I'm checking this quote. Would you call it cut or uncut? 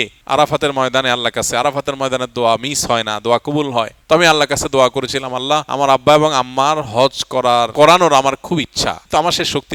uncut